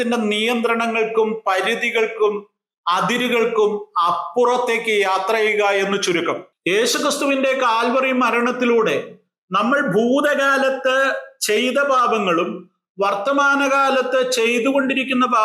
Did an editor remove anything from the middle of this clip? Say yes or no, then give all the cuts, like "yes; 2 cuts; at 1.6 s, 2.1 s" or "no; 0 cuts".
yes; 1 cut; at 6.5 s